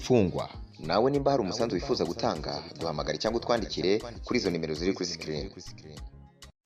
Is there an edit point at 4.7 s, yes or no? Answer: no